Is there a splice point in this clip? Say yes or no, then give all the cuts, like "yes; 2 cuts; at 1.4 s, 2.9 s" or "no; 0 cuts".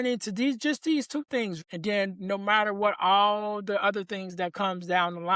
yes; 1 cut; at 1.6 s